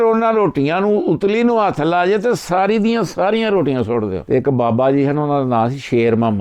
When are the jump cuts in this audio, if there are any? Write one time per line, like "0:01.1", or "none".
0:04.2

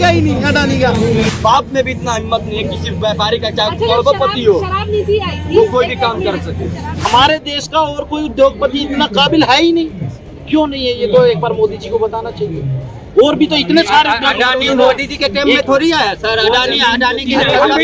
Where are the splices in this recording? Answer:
0:01.3
0:07.1

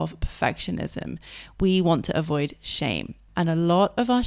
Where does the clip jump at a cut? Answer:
0:03.2

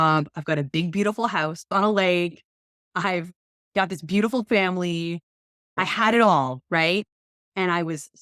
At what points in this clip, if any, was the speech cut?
0:01.7
0:05.8

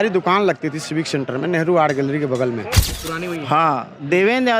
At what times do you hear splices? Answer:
0:02.9

